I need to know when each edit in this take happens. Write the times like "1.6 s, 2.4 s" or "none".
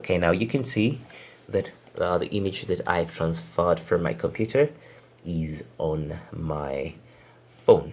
none